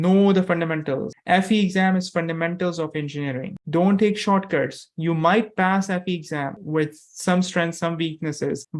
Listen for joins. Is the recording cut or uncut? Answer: cut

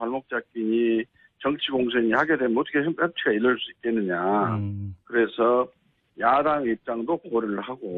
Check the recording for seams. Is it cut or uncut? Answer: uncut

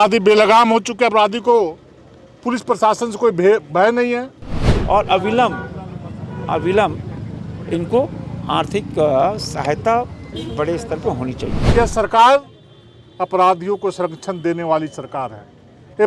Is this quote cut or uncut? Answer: cut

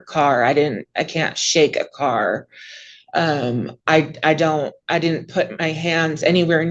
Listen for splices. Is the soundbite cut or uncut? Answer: uncut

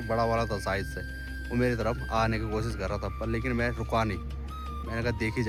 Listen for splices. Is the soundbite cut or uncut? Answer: uncut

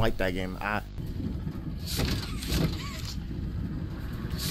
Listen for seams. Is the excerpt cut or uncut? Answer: cut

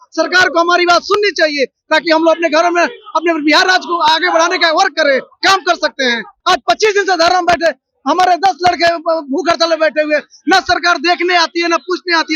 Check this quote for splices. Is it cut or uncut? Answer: cut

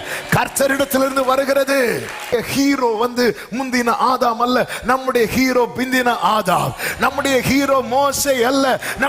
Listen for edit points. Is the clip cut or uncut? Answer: cut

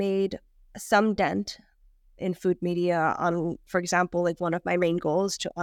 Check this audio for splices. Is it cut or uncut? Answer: uncut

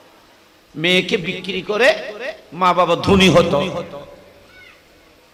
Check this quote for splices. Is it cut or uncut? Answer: uncut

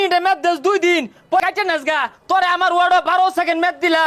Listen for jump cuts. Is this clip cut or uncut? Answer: cut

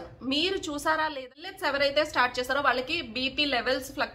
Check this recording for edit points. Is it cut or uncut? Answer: cut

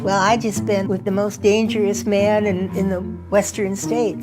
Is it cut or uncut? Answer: cut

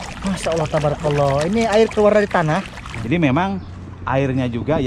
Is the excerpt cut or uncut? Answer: cut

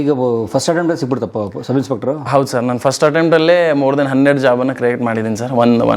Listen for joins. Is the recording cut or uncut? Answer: uncut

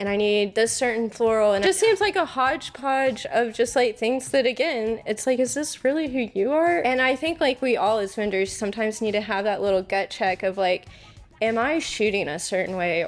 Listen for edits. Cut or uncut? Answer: cut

